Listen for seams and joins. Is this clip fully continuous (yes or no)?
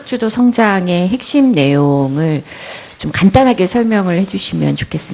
yes